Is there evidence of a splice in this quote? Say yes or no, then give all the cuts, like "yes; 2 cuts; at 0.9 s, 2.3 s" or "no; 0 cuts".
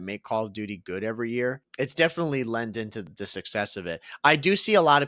yes; 2 cuts; at 1.7 s, 3.1 s